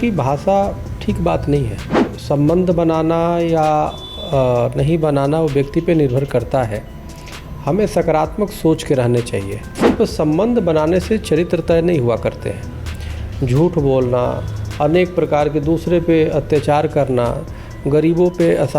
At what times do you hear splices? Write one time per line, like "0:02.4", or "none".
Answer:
0:02.1
0:09.6

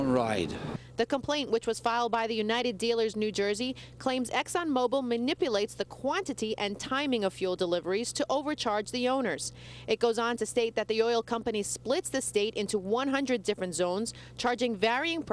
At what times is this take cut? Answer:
0:09.5

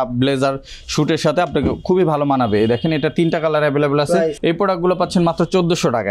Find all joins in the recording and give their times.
0:04.4

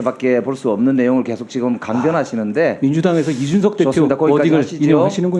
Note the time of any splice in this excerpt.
none

